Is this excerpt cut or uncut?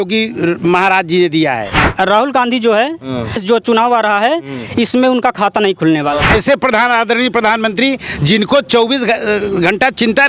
cut